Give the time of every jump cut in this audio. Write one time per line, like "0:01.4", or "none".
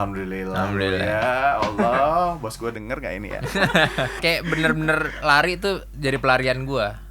0:04.2